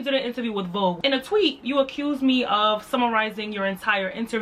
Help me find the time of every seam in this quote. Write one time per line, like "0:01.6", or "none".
0:01.0